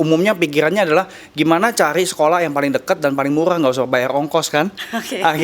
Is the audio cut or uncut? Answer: uncut